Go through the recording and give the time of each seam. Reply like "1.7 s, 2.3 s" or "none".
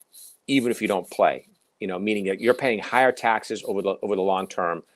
none

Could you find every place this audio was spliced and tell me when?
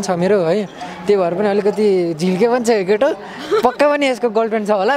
none

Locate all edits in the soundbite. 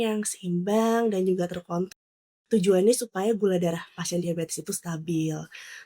2.0 s

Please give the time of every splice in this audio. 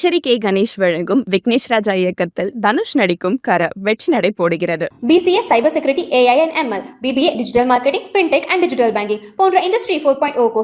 none

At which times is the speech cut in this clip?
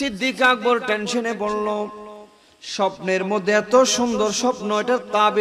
none

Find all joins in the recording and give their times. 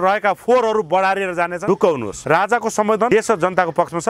1.6 s, 2.1 s, 3.1 s

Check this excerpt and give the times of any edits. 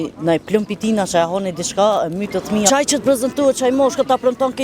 2.7 s

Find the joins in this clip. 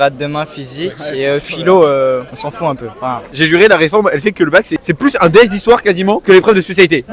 3.4 s, 4.8 s

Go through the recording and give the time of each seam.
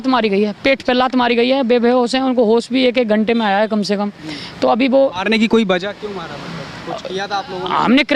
none

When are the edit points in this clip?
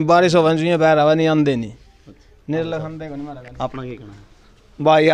none

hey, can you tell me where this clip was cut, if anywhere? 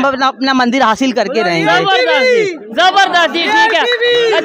none

